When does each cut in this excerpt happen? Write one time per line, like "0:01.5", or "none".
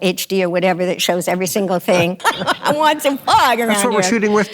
0:02.2